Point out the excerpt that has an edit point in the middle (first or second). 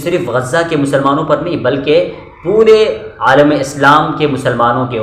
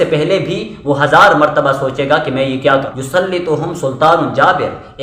second